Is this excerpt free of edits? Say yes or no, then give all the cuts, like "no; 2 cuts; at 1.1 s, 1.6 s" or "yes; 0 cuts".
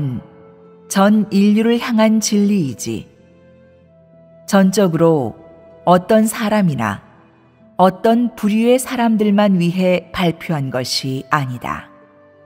yes; 0 cuts